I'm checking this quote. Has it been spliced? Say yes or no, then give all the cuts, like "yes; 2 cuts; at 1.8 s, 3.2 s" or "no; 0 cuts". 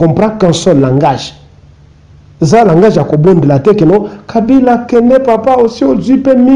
no; 0 cuts